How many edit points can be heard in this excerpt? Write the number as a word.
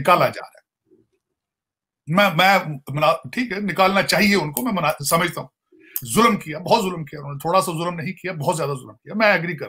one